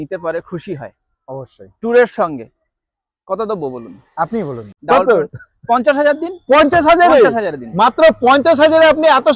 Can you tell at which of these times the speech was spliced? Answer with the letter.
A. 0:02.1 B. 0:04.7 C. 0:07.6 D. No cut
B